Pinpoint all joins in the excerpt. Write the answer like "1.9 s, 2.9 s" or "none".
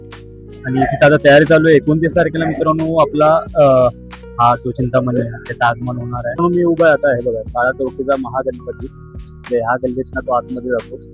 6.3 s